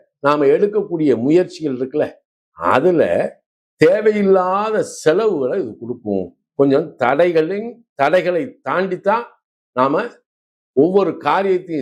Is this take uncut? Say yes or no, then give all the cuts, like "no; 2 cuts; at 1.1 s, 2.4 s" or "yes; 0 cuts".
yes; 0 cuts